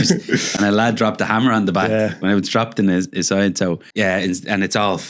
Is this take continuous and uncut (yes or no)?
no